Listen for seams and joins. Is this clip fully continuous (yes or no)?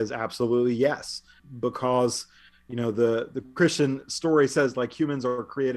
no